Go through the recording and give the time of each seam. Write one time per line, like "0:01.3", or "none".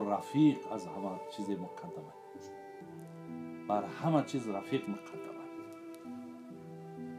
0:05.2